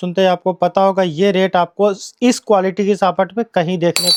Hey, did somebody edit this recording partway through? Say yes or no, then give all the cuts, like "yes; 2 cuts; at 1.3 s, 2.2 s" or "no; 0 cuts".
no; 0 cuts